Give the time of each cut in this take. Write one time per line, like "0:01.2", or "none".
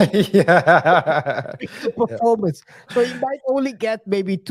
none